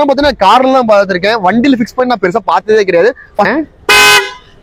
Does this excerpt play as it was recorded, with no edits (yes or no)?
no